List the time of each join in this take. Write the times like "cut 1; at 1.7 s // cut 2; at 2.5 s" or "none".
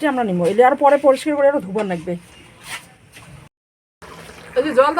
cut 1; at 3.5 s